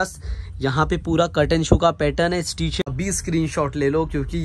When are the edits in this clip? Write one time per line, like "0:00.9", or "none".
0:02.8